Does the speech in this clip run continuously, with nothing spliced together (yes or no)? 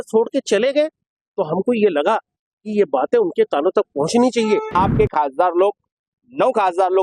no